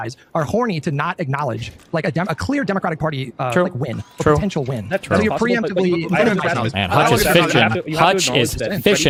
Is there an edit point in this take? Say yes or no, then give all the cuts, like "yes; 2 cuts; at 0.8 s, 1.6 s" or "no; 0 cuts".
no; 0 cuts